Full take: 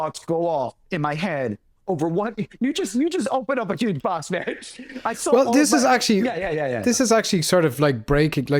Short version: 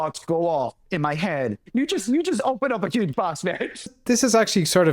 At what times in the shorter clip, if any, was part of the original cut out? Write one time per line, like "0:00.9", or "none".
0:01.6
0:04.0